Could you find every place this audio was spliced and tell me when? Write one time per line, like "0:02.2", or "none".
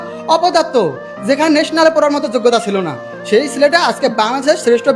none